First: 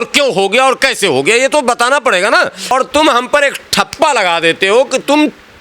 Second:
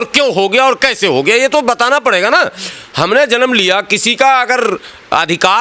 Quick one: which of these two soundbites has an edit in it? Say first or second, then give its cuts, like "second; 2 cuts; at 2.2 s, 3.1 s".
first; 1 cut; at 2.7 s